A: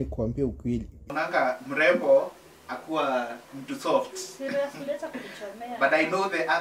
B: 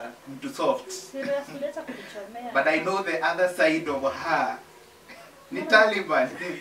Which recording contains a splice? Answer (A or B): A